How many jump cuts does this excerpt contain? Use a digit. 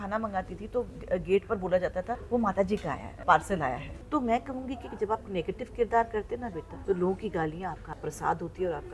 5